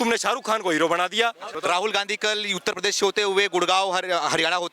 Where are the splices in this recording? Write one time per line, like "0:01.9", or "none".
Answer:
0:01.5